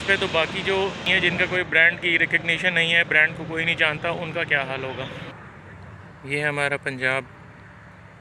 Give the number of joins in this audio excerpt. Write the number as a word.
two